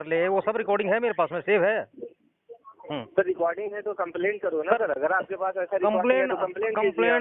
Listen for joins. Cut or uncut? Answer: uncut